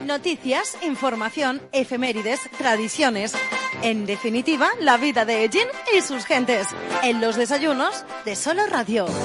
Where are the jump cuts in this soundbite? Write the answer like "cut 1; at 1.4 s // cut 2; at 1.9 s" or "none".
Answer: none